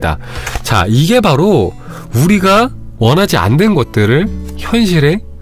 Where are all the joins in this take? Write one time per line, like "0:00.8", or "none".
0:02.8